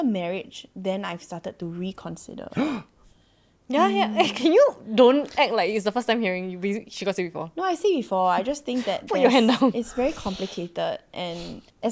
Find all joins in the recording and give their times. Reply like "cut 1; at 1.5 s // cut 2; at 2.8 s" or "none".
none